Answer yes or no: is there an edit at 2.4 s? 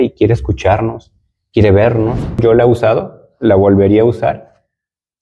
yes